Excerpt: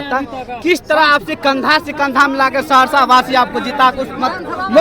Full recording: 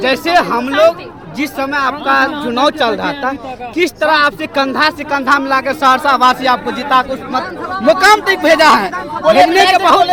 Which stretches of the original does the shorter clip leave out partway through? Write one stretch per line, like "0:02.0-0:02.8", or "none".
none